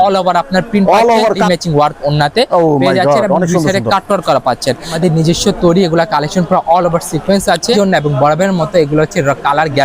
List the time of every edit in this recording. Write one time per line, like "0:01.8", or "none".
0:01.4
0:05.0
0:07.7